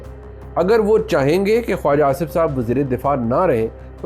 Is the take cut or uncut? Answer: uncut